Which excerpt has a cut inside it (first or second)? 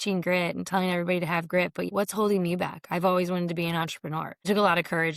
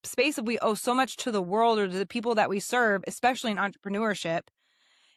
first